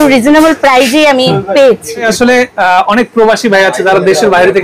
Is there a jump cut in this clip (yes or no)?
yes